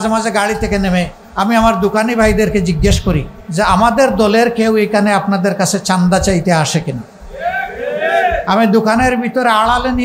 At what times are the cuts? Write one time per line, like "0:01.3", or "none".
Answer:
0:01.2
0:03.4

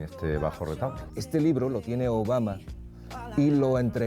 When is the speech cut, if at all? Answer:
0:01.1

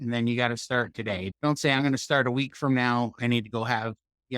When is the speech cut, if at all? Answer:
0:01.3

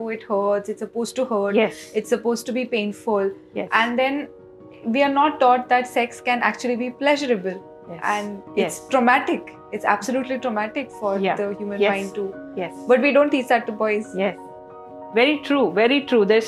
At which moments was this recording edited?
none

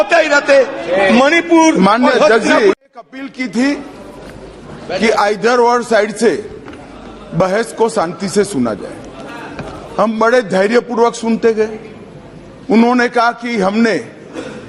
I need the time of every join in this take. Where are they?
0:02.8

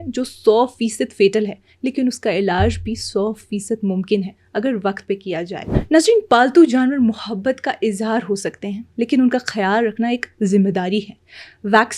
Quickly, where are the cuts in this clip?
0:05.7

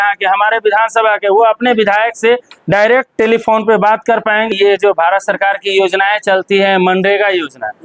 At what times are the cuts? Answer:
0:04.5

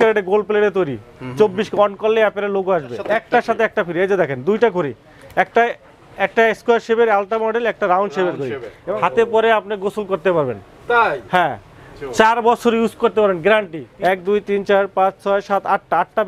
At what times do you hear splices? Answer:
0:03.0
0:08.7
0:13.8

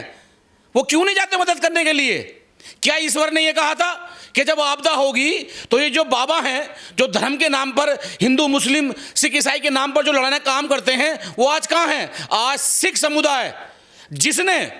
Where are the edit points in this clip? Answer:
none

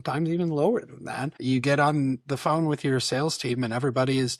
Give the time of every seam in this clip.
0:01.4

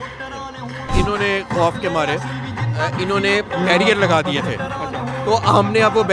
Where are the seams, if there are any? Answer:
0:00.9

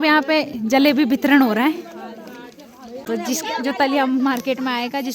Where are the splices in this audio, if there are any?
0:03.0

